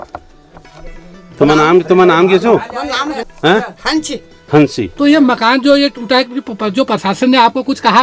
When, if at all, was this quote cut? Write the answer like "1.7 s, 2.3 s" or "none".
3.3 s